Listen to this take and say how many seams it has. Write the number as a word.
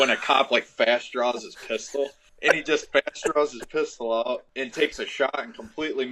two